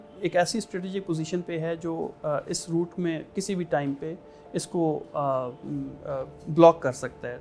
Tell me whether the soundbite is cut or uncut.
uncut